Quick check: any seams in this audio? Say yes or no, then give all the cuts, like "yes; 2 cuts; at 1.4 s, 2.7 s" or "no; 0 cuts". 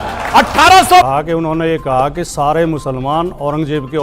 yes; 1 cut; at 1.1 s